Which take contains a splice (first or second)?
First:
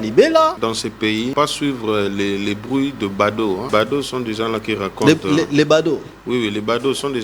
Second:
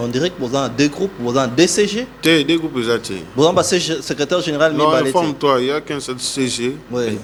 first